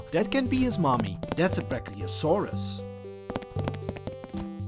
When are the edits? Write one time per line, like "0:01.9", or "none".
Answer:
none